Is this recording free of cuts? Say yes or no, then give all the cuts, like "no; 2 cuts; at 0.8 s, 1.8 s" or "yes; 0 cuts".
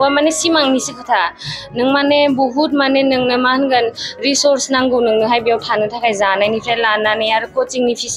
yes; 0 cuts